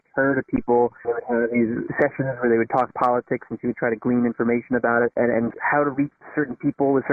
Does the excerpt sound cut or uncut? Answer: cut